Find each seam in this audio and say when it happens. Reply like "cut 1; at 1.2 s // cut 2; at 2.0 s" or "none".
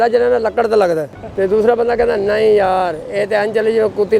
cut 1; at 1.2 s